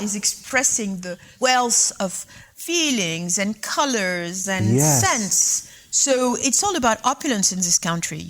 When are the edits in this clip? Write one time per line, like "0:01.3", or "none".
0:01.3
0:02.4